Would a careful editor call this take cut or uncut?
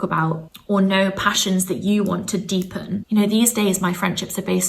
cut